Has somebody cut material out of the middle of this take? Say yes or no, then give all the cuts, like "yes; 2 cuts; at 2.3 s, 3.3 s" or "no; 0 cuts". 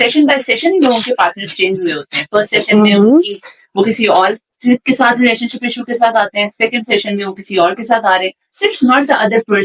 no; 0 cuts